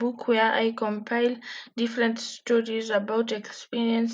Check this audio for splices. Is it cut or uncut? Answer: uncut